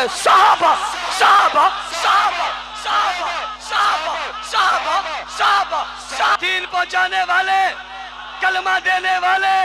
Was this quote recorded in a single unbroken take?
no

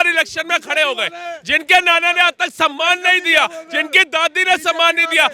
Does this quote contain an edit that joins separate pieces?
no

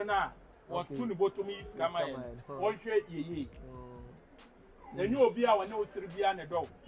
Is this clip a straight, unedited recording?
yes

